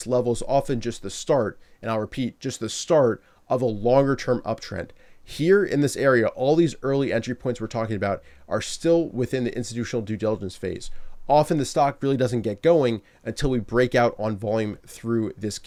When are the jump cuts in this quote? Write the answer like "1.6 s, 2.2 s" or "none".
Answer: none